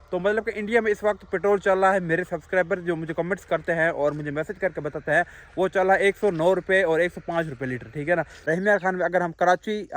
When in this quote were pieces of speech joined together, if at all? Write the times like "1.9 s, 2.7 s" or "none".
8.3 s